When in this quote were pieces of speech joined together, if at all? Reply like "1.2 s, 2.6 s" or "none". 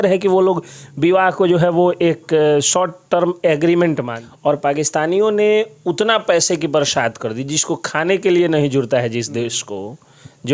4.1 s